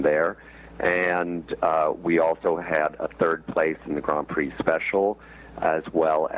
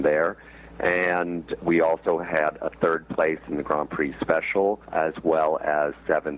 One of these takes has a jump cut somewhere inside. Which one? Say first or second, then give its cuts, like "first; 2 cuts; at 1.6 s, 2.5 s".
second; 2 cuts; at 1.6 s, 4.9 s